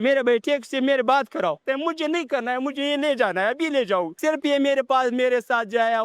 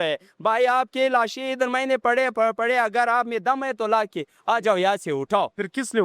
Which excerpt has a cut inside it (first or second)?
first